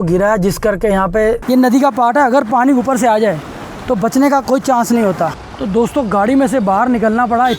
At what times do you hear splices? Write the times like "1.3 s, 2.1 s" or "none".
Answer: 1.4 s, 5.5 s